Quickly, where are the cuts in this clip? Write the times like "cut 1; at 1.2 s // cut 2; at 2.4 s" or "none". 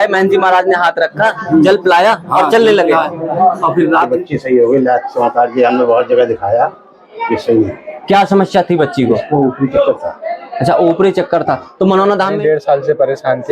cut 1; at 4.1 s // cut 2; at 12.3 s